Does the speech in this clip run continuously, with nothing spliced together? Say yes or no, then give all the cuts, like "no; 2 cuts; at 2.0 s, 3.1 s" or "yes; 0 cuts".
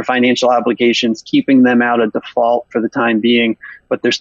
yes; 0 cuts